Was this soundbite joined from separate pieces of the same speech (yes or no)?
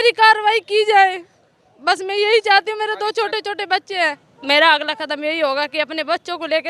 yes